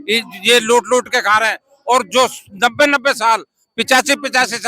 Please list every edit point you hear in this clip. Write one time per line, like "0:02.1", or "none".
none